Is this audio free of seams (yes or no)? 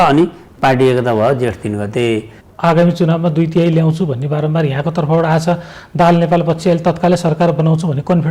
no